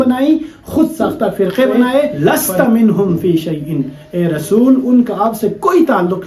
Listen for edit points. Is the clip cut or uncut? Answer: cut